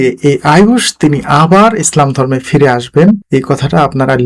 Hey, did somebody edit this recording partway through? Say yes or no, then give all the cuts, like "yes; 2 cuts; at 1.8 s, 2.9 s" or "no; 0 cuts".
yes; 1 cut; at 3.2 s